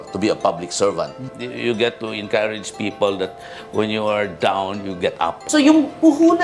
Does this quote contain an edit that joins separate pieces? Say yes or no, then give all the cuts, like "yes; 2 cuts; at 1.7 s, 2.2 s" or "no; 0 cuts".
yes; 2 cuts; at 1.3 s, 5.4 s